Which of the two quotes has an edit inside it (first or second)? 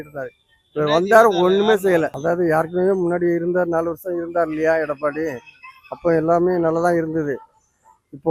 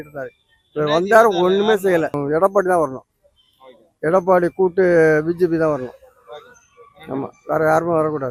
first